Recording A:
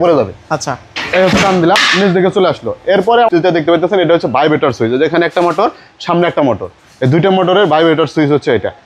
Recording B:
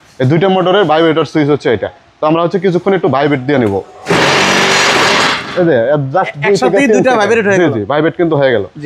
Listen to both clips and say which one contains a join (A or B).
A